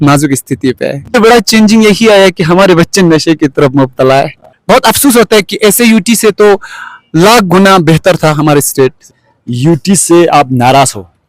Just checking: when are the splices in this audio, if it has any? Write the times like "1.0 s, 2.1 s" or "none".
1.1 s, 4.5 s, 9.3 s